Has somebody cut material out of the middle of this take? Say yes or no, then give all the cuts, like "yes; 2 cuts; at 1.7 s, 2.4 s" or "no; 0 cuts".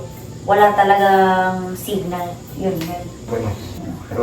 yes; 1 cut; at 3.3 s